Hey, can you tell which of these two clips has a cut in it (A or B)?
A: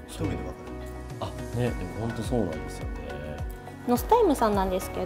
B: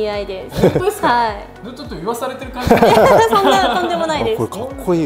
A